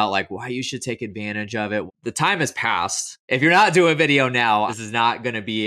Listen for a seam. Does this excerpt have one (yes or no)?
yes